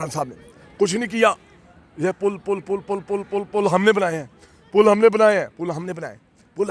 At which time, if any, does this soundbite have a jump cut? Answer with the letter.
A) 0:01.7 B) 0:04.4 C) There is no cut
C